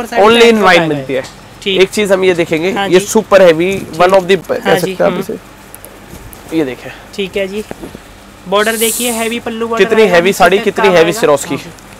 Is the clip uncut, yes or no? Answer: yes